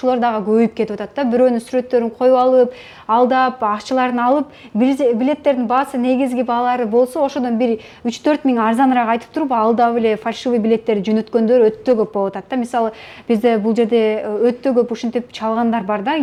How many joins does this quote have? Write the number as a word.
zero